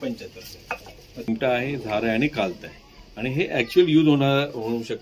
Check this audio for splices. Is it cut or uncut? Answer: cut